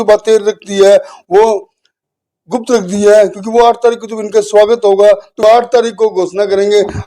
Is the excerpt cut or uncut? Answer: cut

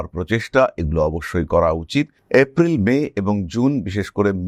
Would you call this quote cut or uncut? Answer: uncut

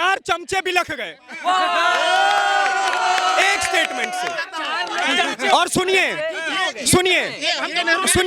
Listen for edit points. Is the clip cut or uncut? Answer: uncut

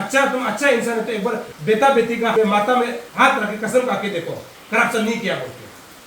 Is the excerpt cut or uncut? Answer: cut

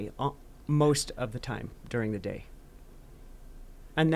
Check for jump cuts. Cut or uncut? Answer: uncut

